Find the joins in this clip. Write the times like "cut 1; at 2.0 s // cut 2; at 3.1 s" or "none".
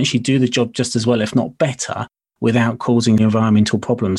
cut 1; at 3.2 s